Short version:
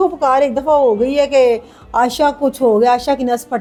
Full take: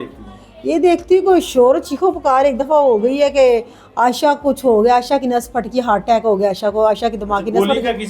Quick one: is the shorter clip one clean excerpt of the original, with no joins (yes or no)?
yes